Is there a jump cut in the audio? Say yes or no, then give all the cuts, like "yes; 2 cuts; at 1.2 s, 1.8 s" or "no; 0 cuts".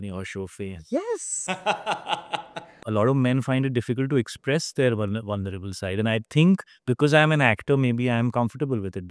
yes; 1 cut; at 2.8 s